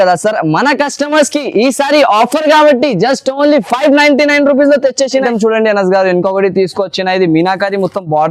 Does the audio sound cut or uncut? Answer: cut